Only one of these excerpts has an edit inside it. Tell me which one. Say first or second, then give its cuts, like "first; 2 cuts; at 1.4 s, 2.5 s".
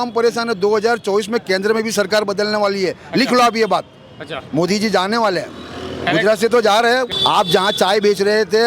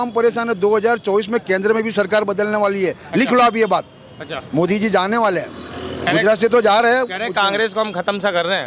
first; 1 cut; at 7.1 s